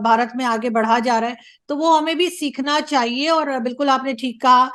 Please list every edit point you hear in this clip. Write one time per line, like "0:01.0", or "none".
none